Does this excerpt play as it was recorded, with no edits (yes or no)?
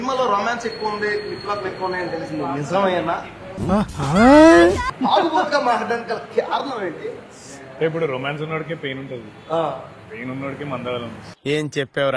no